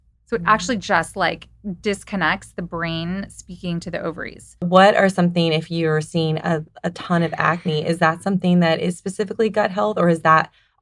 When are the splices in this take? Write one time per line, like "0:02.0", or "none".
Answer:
0:04.6